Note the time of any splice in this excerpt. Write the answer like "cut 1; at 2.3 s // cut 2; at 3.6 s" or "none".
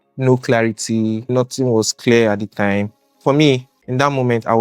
cut 1; at 1.2 s // cut 2; at 3.1 s